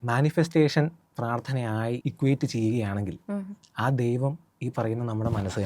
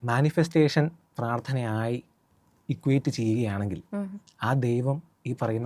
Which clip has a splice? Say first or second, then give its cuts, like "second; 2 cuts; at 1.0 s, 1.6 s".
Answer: first; 1 cut; at 2.0 s